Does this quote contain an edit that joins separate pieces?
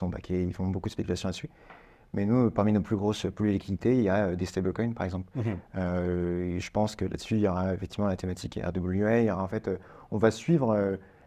no; 0 cuts

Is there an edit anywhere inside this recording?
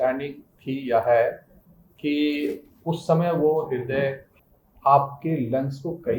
yes; 1 cut; at 4.3 s

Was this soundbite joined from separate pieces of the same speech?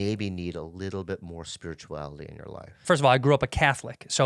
yes; 1 cut; at 2.8 s

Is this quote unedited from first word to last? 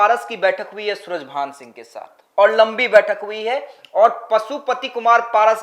yes; 0 cuts

